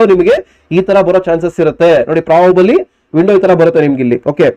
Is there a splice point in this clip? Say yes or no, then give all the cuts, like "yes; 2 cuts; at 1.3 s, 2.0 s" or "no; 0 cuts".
no; 0 cuts